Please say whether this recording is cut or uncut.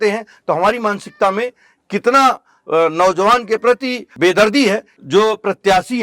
cut